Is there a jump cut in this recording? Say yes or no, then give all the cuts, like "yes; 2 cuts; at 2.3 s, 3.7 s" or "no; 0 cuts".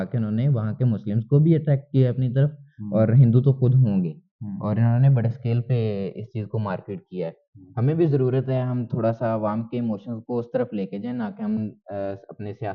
no; 0 cuts